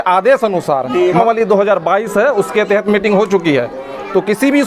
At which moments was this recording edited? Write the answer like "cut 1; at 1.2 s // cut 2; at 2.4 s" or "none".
cut 1; at 1.2 s